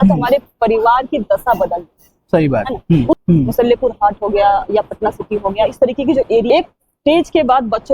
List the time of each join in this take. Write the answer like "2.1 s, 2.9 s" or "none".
3.1 s, 6.5 s